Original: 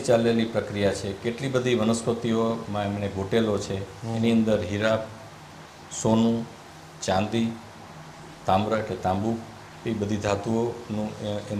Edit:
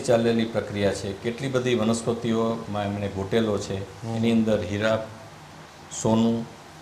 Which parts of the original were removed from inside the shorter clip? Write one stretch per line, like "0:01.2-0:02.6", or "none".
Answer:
none